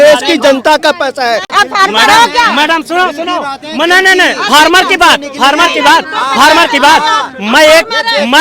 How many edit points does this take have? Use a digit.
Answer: 1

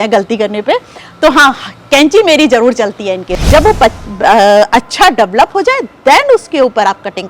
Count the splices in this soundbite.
1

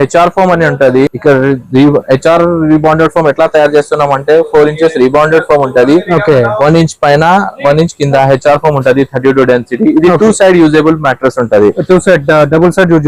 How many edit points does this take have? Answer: 1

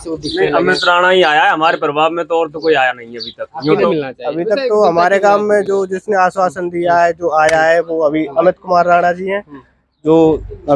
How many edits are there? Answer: 1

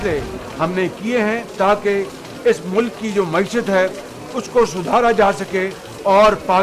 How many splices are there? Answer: 1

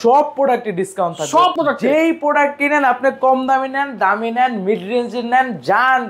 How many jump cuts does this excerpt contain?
1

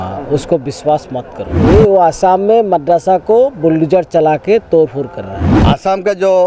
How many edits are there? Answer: 2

